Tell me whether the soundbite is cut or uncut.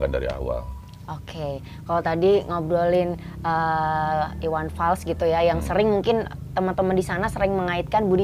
uncut